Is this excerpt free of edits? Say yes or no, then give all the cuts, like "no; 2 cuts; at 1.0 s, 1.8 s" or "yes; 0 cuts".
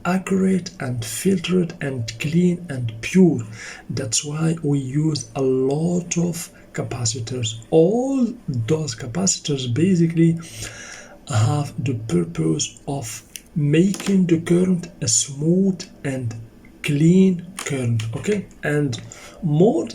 no; 1 cut; at 18.5 s